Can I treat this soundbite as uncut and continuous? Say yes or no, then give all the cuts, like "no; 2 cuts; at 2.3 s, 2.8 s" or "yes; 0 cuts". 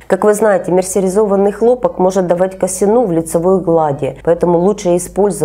yes; 0 cuts